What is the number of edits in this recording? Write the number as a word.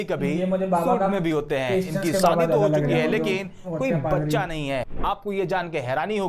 one